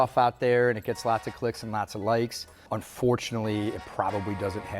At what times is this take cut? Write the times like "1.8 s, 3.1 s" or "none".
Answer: 2.7 s